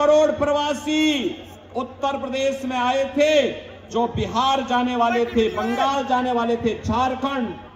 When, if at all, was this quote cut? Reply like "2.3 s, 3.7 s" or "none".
none